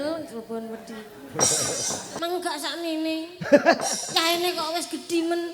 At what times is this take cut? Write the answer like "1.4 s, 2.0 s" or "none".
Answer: 2.1 s